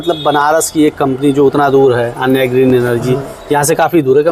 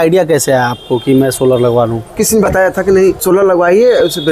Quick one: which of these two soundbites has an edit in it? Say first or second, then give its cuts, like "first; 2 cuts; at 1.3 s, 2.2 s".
second; 2 cuts; at 2.2 s, 3.2 s